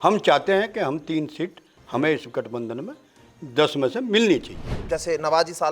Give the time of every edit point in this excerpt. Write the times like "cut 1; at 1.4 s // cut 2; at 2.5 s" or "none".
cut 1; at 4.8 s

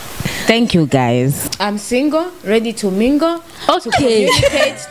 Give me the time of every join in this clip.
cut 1; at 1.5 s

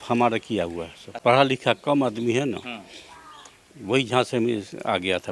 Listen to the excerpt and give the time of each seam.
cut 1; at 1.0 s

